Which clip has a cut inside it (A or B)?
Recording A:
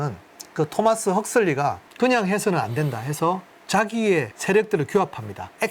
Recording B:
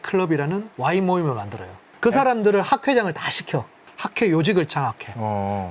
B